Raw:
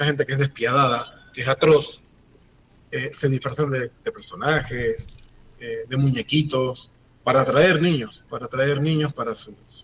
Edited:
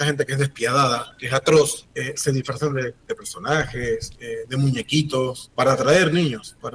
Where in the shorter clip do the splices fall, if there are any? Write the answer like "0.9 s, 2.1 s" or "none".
1.1 s, 1.9 s, 4.2 s, 5.4 s